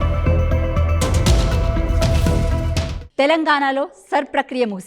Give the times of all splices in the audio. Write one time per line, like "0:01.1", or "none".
0:03.0